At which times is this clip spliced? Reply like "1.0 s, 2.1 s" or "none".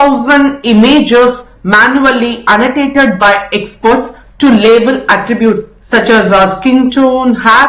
none

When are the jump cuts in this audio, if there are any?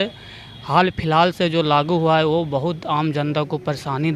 none

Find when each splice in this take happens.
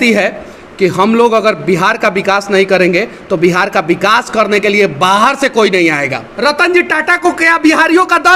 6.2 s

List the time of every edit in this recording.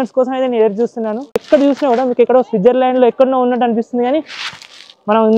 1.4 s

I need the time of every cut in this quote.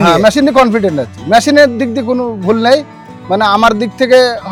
none

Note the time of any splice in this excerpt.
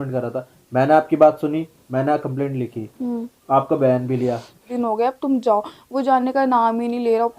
4.7 s

